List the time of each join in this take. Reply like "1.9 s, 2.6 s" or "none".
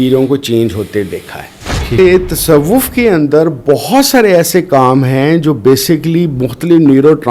2.0 s